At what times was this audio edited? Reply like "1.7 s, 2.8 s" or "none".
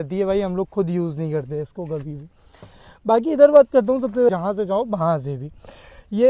4.3 s